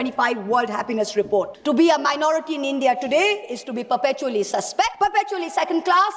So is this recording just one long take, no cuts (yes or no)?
no